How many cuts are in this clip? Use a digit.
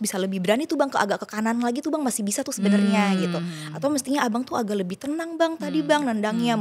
0